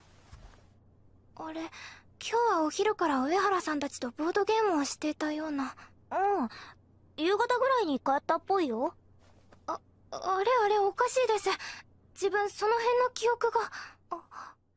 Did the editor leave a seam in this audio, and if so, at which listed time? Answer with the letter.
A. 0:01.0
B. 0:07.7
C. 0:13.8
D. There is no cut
C